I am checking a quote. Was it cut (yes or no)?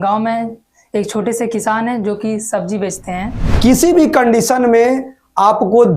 yes